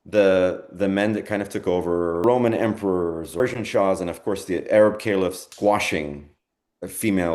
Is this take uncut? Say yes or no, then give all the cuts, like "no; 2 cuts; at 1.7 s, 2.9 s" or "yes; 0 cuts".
no; 3 cuts; at 2.2 s, 3.4 s, 5.5 s